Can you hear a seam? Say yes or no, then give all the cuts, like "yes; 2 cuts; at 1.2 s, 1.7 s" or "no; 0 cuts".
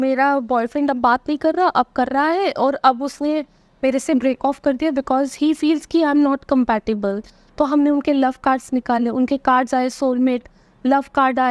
no; 0 cuts